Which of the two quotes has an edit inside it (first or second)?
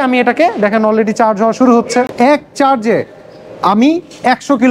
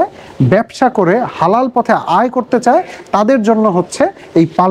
first